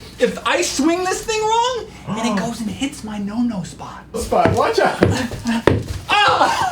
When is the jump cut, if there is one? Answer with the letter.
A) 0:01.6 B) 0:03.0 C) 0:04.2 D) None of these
C